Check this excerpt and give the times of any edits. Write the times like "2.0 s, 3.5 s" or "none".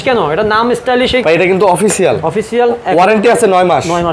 1.2 s